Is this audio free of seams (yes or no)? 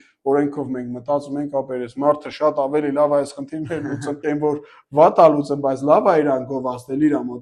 yes